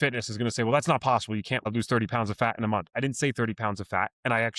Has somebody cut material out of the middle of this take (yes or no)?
yes